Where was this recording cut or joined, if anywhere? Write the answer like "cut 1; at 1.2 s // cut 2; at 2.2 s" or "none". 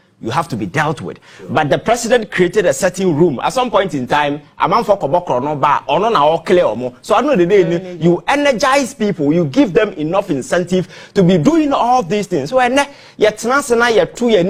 none